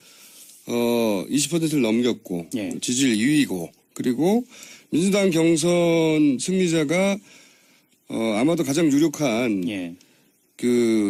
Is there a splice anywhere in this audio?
no; 0 cuts

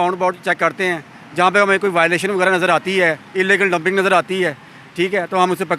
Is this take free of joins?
yes; 0 cuts

